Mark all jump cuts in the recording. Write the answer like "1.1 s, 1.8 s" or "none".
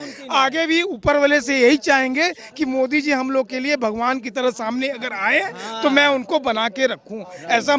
none